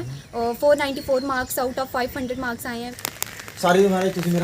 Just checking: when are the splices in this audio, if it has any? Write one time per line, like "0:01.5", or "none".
0:02.9